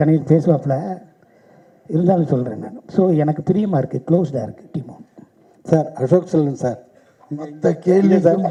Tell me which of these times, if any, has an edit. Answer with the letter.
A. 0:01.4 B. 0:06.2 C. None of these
C